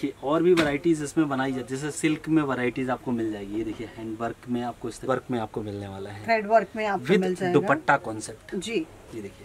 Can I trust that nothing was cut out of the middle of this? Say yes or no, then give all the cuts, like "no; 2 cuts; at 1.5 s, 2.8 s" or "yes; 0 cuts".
no; 1 cut; at 5.1 s